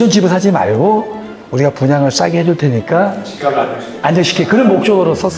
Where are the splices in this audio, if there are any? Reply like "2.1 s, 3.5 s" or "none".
none